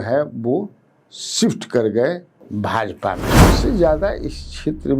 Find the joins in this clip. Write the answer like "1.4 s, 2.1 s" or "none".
3.5 s